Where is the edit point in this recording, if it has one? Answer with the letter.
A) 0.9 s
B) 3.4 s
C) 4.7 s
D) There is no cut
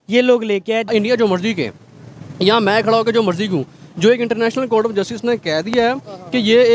A